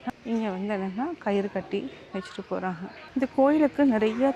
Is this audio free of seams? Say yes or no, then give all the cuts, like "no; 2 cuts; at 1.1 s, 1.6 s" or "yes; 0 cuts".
yes; 0 cuts